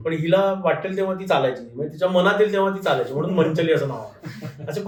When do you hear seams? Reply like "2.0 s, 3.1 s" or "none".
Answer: none